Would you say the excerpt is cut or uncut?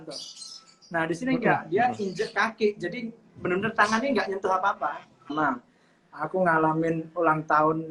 cut